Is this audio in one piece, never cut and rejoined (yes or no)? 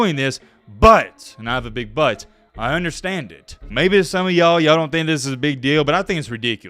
no